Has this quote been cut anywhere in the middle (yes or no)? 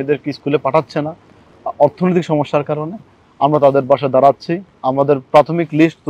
no